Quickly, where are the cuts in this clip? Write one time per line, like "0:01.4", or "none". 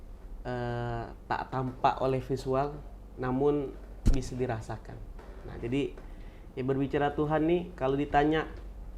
none